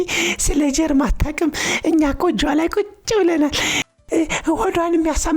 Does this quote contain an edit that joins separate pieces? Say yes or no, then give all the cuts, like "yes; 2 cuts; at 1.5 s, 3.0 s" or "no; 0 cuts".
yes; 1 cut; at 4.0 s